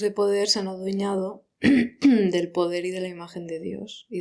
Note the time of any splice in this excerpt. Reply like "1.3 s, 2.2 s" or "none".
none